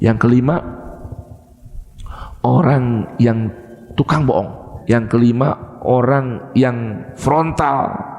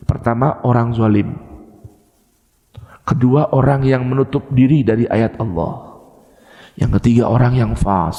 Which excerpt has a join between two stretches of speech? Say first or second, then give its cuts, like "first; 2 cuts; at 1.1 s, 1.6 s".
first; 2 cuts; at 4.7 s, 7.2 s